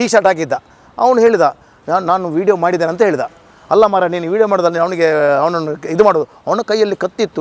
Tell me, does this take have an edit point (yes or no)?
no